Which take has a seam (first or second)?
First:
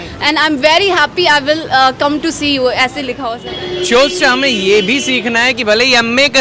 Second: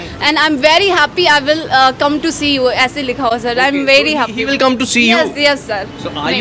first